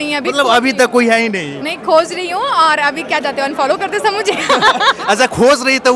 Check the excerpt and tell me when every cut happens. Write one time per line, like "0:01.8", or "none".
none